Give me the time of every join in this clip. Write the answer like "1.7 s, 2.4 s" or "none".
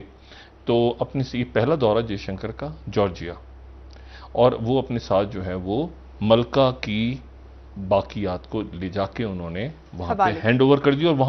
none

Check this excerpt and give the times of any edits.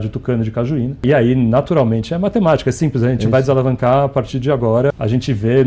1.0 s, 4.9 s

